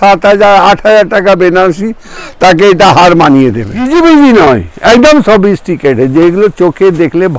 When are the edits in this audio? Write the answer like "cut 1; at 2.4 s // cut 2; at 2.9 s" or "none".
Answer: cut 1; at 3.9 s

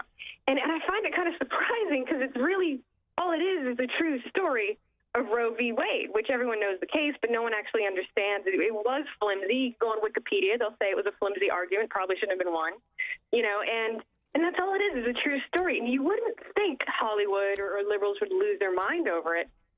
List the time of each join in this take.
none

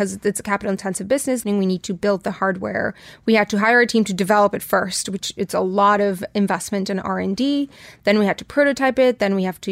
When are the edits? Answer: cut 1; at 1.4 s

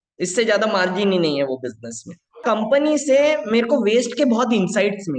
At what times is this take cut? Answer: cut 1; at 2.4 s

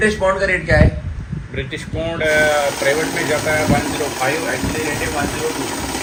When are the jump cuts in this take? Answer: none

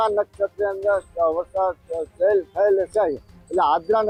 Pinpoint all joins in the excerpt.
none

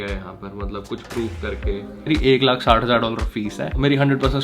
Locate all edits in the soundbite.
cut 1; at 2.1 s

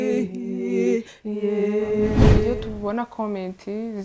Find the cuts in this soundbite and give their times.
cut 1; at 2.5 s

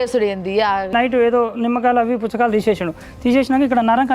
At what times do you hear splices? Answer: cut 1; at 0.9 s

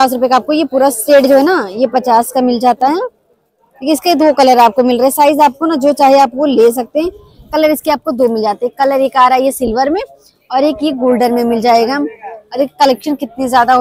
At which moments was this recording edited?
none

